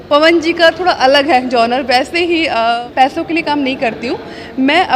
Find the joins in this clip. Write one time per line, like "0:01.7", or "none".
0:02.8